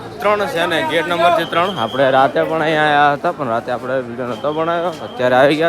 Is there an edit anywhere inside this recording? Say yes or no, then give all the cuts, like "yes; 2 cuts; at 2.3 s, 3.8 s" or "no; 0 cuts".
no; 0 cuts